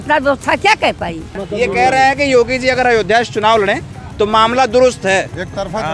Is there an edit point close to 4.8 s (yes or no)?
no